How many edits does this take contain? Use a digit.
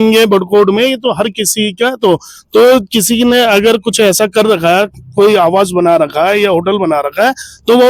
0